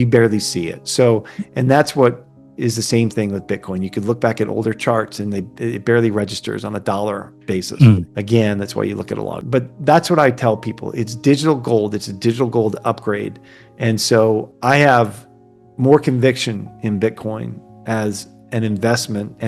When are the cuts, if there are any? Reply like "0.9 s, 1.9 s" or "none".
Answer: 8.1 s, 9.4 s, 14.5 s